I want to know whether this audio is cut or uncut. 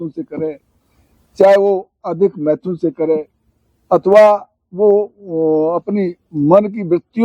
uncut